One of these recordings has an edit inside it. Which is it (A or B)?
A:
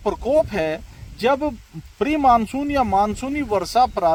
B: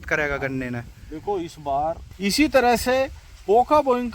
B